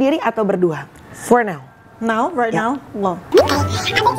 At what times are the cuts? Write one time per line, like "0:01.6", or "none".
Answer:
0:03.2